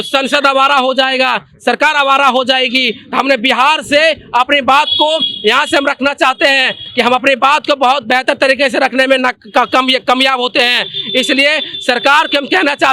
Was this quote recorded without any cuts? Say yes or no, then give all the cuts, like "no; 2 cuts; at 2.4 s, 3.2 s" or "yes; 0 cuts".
yes; 0 cuts